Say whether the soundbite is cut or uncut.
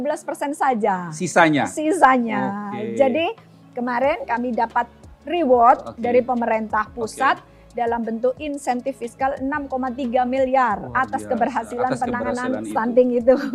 uncut